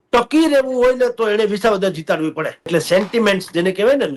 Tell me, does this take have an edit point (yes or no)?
yes